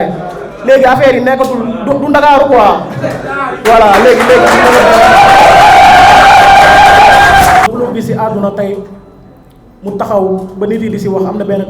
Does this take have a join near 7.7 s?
yes; 1 cut; at 7.7 s

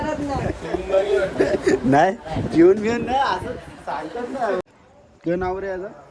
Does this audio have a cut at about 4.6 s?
yes; 1 cut; at 4.6 s

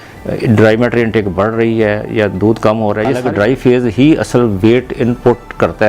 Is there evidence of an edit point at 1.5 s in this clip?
no; 1 cut; at 3.2 s

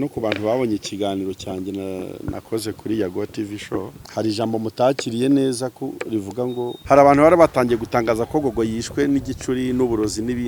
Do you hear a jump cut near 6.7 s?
yes; 2 cuts; at 4.0 s, 6.7 s

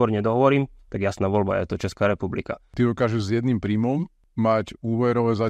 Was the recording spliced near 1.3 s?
no; 2 cuts; at 2.7 s, 4.2 s

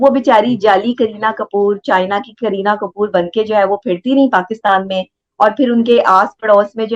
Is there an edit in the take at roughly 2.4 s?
no; 0 cuts

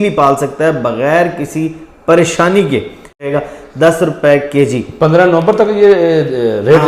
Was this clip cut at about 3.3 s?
yes; 1 cut; at 3.3 s

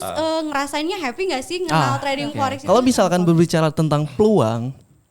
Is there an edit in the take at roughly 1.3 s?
no; 1 cut; at 2.6 s

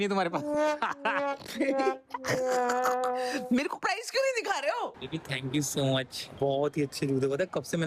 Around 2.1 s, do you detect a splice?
no; 2 cuts; at 5.0 s, 6.2 s

